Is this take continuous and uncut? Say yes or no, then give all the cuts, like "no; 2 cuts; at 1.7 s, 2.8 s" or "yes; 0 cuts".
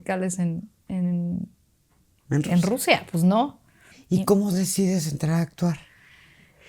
no; 1 cut; at 3.9 s